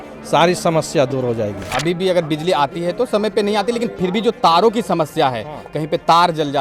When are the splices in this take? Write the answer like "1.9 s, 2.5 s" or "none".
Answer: 1.7 s